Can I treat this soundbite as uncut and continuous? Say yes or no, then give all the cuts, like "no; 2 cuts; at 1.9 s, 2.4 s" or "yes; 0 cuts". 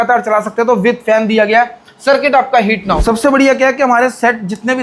no; 1 cut; at 3.0 s